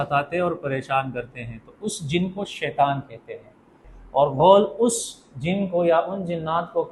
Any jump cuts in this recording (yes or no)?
yes